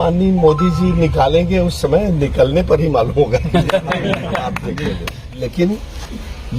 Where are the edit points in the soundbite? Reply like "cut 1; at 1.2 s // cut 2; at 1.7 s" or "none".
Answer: cut 1; at 5.4 s